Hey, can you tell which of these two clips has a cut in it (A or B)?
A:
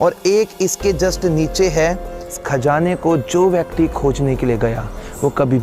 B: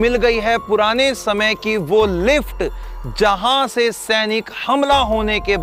A